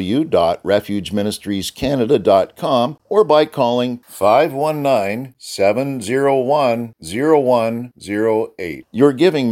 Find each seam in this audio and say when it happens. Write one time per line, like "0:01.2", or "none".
0:03.0